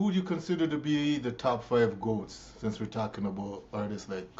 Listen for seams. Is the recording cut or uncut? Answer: uncut